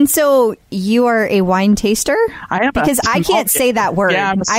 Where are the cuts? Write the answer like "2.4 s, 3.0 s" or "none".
none